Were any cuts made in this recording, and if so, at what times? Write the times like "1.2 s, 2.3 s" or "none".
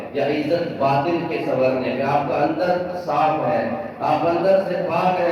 none